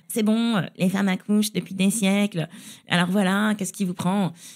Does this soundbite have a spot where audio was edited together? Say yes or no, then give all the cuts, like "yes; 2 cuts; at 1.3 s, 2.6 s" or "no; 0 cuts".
no; 0 cuts